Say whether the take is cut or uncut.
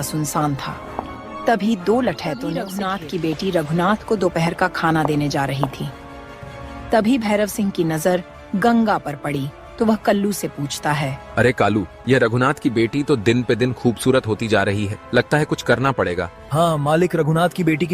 cut